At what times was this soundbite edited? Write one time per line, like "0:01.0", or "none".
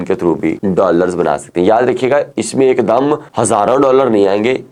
none